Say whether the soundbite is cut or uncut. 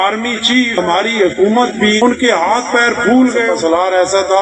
cut